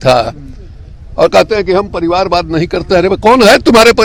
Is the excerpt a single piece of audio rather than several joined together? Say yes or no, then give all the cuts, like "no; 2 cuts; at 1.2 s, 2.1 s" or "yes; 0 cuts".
yes; 0 cuts